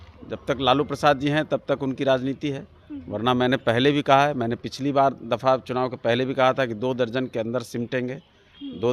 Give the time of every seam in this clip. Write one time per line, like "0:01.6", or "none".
none